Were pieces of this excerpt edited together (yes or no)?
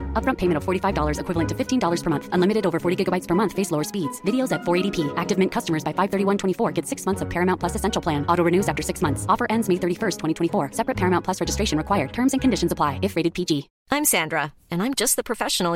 yes